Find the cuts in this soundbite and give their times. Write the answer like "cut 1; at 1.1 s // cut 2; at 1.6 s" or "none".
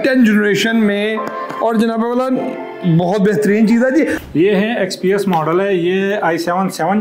cut 1; at 4.2 s